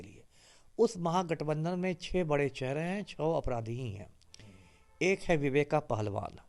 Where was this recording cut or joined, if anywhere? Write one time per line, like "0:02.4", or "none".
none